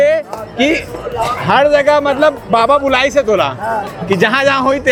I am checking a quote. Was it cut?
no; 0 cuts

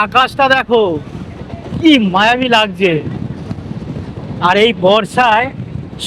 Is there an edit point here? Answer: no; 0 cuts

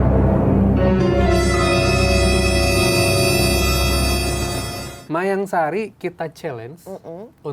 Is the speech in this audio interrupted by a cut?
yes; 1 cut; at 4.8 s

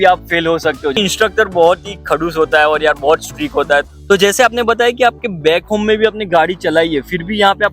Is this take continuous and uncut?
no; 2 cuts; at 0.9 s, 3.9 s

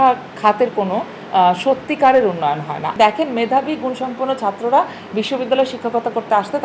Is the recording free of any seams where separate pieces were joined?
no; 1 cut; at 2.9 s

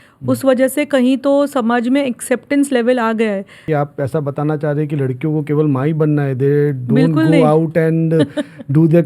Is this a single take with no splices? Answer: no; 1 cut; at 3.6 s

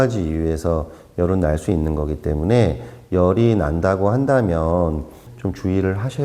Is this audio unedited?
yes; 0 cuts

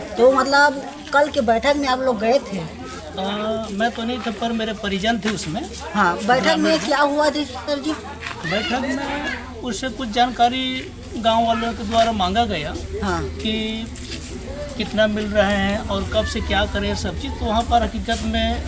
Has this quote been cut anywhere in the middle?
no; 0 cuts

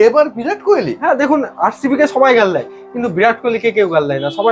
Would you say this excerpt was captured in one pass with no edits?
yes; 0 cuts

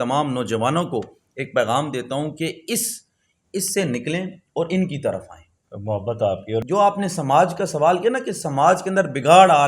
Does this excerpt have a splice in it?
yes; 1 cut; at 6.6 s

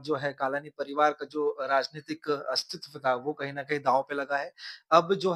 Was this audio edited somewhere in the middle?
no; 0 cuts

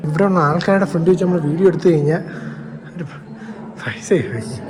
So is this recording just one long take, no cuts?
yes; 0 cuts

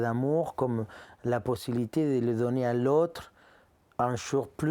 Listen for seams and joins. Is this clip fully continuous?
yes; 0 cuts

